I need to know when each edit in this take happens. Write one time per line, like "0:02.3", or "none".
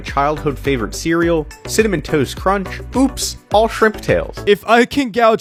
none